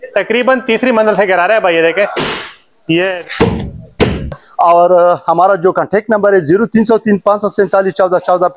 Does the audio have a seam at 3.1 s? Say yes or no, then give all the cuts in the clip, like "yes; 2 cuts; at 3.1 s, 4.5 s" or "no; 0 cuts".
yes; 1 cut; at 3.1 s